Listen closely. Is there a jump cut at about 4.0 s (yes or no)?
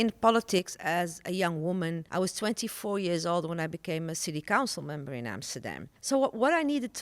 no